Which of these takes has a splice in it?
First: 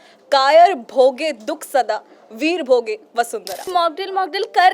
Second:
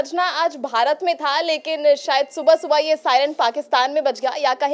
first; 1 cut; at 3.6 s

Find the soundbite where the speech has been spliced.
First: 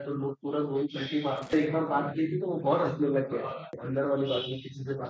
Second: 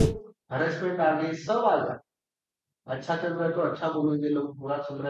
first; 2 cuts; at 1.5 s, 3.8 s

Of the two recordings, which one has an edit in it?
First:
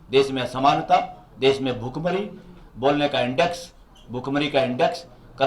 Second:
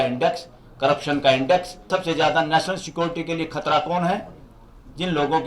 second; 1 cut; at 1.9 s

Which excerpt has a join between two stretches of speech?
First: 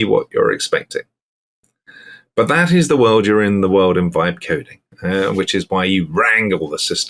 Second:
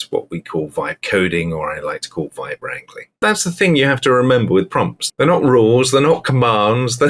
second; 2 cuts; at 3.2 s, 5.0 s

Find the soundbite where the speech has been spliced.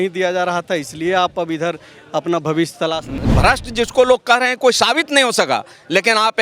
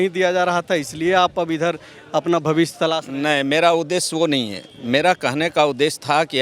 first; 1 cut; at 3.1 s

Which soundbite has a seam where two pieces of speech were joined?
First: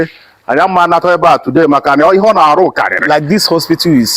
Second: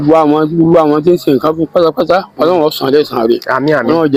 first; 1 cut; at 3.0 s

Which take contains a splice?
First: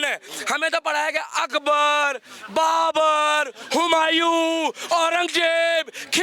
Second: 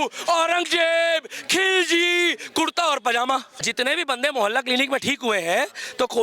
second; 1 cut; at 3.5 s

